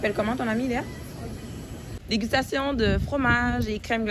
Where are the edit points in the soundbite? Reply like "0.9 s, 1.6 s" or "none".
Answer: 1.9 s